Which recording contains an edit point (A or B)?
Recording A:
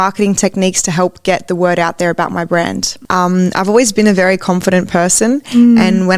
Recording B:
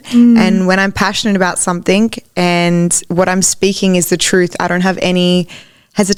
A